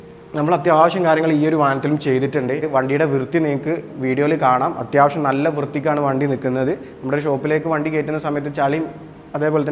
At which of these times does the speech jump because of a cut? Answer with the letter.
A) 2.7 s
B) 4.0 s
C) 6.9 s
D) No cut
A